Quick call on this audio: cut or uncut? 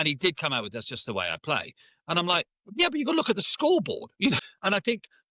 cut